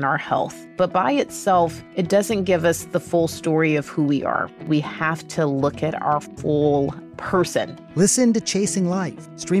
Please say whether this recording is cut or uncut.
uncut